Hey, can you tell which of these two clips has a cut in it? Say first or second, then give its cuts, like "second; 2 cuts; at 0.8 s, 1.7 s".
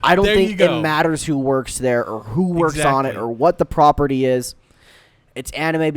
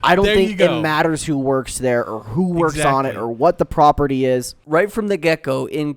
second; 1 cut; at 4.5 s